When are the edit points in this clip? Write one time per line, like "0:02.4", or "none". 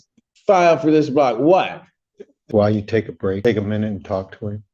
0:02.4
0:03.4